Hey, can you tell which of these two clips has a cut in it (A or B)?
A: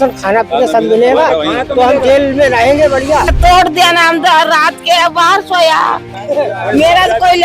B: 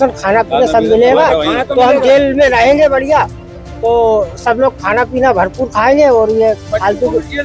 A